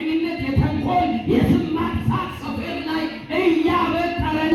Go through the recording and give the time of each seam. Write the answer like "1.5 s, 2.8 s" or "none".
none